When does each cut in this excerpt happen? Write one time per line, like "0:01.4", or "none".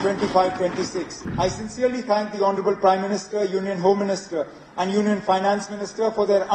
0:01.2